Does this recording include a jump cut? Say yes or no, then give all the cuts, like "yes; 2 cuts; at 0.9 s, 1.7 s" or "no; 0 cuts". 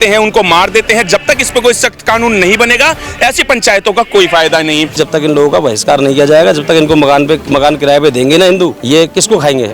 yes; 3 cuts; at 4.9 s, 7.4 s, 8.8 s